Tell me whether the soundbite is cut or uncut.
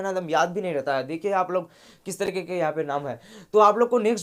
uncut